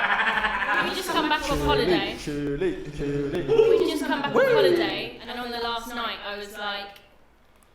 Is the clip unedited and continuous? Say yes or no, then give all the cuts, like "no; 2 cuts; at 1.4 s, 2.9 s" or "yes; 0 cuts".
yes; 0 cuts